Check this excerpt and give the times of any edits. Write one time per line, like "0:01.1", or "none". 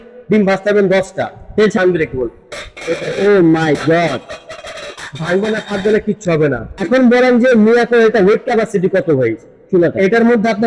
0:01.8
0:06.7